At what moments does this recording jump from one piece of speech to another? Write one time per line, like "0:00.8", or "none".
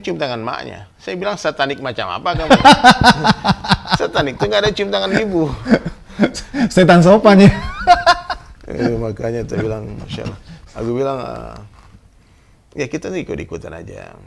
none